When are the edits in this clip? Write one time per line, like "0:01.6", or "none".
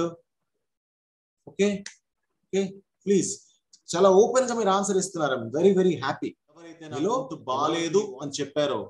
0:07.3